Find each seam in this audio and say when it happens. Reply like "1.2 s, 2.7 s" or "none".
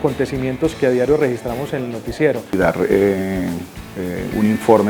2.5 s